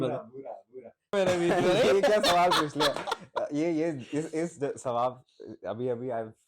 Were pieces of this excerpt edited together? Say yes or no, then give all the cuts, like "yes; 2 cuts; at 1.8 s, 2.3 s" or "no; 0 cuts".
yes; 1 cut; at 1.1 s